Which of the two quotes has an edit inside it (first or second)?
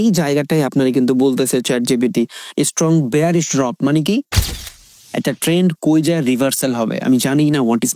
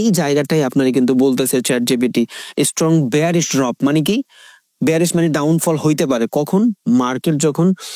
first